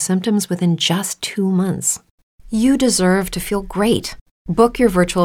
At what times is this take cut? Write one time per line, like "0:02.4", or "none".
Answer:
0:01.1